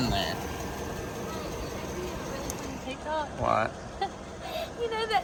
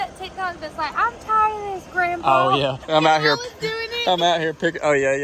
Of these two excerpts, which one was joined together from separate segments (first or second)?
second